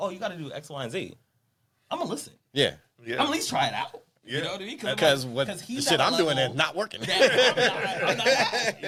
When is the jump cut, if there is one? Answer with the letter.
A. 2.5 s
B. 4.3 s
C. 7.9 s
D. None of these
D